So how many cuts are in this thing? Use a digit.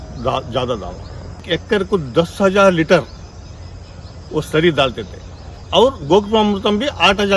2